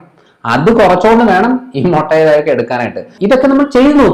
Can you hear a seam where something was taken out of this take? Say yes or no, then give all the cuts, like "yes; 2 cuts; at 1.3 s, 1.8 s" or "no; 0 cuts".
yes; 1 cut; at 3.1 s